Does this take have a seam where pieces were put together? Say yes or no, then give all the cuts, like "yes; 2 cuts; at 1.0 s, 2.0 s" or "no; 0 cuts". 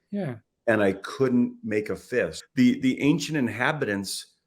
yes; 1 cut; at 2.4 s